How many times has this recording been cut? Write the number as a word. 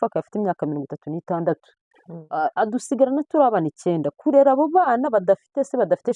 zero